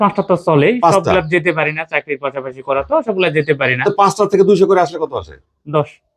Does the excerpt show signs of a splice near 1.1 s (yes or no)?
no